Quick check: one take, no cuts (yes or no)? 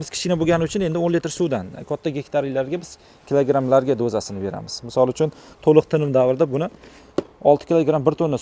yes